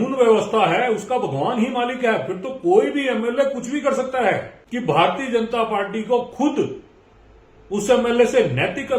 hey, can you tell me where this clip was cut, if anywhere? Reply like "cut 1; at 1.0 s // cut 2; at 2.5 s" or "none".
cut 1; at 4.6 s